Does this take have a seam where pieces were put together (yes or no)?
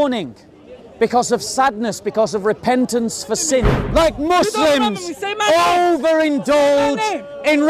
yes